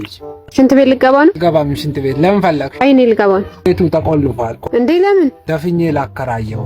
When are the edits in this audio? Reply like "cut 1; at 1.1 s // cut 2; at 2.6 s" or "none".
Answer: none